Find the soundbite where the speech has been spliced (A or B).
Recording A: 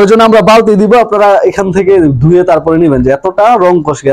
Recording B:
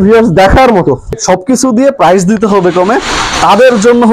B